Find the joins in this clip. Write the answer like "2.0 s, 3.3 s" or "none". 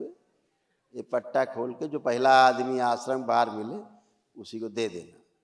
none